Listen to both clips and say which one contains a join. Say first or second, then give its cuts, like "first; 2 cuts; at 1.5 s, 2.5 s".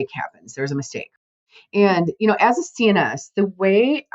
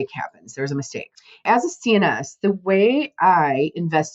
second; 1 cut; at 1.4 s